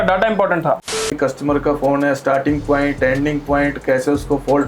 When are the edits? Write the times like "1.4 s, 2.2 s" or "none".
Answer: 1.0 s